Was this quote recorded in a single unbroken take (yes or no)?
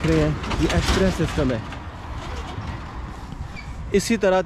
yes